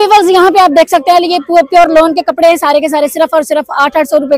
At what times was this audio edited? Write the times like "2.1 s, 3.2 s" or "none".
none